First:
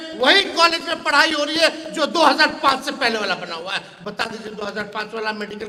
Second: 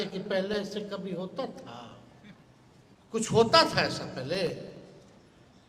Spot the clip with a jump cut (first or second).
second